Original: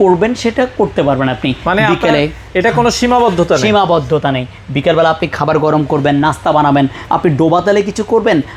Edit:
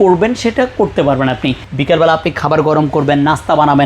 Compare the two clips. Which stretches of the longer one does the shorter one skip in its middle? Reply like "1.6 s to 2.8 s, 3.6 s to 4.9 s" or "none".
1.6 s to 4.6 s